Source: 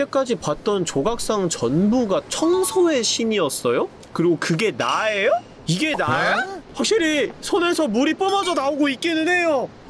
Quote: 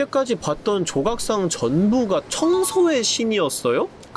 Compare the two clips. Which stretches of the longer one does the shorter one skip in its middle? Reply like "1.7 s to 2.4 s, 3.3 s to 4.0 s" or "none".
none